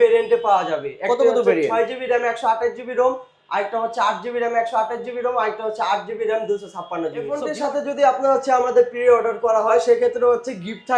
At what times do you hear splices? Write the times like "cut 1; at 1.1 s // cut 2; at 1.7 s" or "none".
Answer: cut 1; at 7.4 s